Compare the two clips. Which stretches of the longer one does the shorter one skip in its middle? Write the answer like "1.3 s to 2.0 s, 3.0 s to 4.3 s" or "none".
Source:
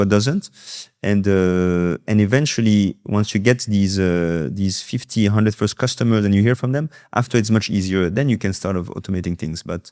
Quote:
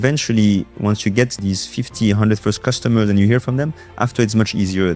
3.6 s to 4.5 s